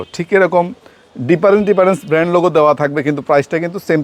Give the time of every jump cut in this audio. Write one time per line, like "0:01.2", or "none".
none

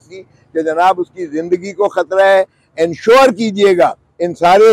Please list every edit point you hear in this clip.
none

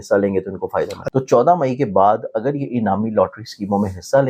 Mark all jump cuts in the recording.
0:01.0

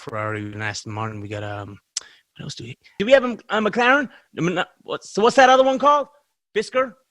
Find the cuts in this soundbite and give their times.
0:03.0

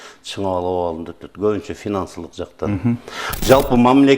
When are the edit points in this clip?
0:03.2

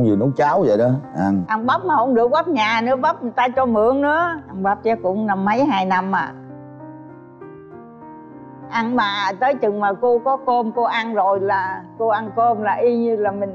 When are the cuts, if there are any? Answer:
none

